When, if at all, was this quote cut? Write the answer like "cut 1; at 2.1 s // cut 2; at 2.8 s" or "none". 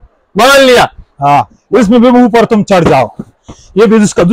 cut 1; at 1.6 s